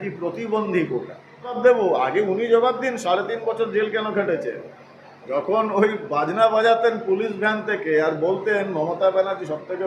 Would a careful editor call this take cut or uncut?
cut